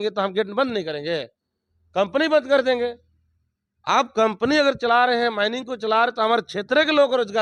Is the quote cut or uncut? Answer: uncut